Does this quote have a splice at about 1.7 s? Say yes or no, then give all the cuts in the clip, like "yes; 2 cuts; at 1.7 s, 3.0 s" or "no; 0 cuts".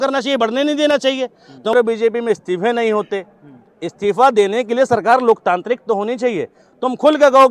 yes; 1 cut; at 1.7 s